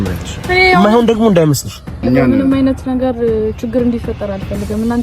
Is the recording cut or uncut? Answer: cut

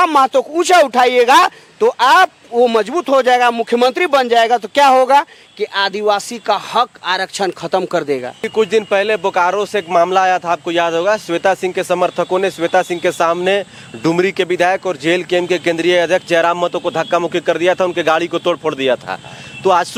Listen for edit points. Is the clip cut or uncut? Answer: uncut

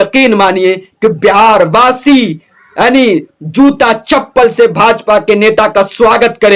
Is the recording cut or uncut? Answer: uncut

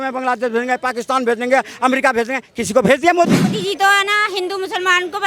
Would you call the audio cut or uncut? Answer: cut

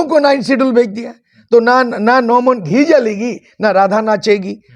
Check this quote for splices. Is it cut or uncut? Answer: uncut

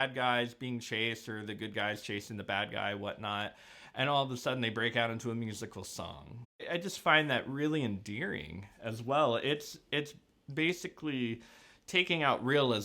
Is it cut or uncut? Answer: cut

